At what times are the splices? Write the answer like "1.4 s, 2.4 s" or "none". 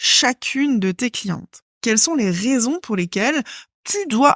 1.7 s